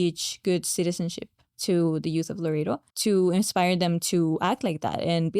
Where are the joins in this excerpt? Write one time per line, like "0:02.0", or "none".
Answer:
0:02.9